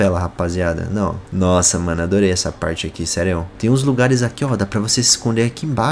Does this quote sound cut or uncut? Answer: cut